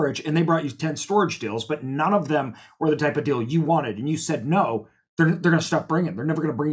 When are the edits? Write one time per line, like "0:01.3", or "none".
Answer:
none